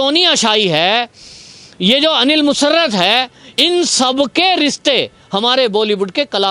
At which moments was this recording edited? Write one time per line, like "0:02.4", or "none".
none